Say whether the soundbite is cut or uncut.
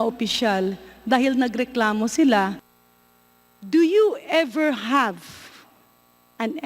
cut